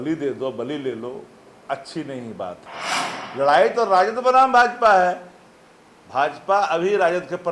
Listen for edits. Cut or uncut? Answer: cut